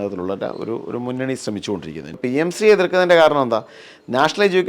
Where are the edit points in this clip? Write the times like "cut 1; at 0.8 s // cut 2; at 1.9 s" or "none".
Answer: cut 1; at 2.1 s